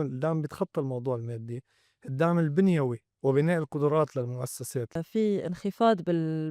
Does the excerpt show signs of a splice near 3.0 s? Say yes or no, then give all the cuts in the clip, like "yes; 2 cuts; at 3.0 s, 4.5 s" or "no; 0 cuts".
no; 1 cut; at 5.0 s